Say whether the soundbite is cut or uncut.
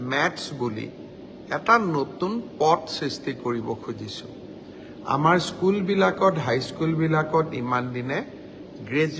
uncut